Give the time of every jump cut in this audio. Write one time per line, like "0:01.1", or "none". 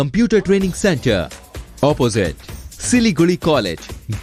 none